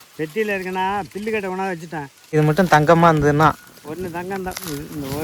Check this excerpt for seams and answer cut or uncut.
cut